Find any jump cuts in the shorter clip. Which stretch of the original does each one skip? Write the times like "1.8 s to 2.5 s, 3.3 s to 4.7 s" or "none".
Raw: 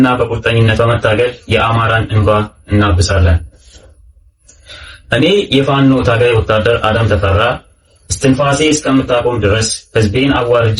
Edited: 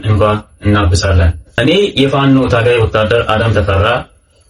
3.6 s to 5.1 s